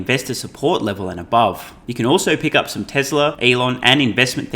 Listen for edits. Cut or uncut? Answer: cut